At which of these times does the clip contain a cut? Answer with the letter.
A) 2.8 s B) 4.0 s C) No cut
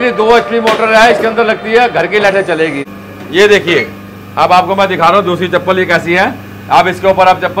A